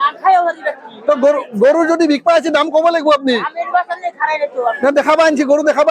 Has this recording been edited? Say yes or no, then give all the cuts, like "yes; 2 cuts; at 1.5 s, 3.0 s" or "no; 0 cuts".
no; 0 cuts